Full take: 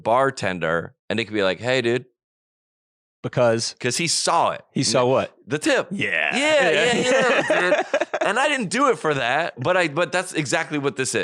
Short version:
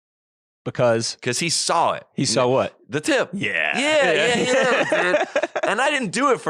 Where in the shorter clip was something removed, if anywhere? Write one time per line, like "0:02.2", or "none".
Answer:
none